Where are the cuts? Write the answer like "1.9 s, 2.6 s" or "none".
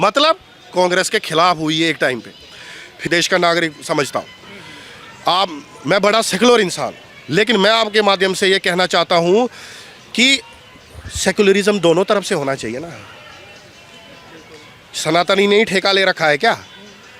3.0 s